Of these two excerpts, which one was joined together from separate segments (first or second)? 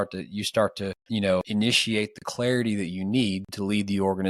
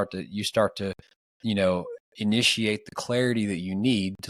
first